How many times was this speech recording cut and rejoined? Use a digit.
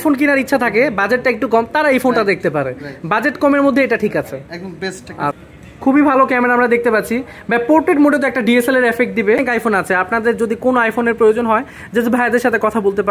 2